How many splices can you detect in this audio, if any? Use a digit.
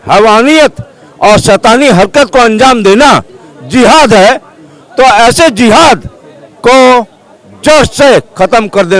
0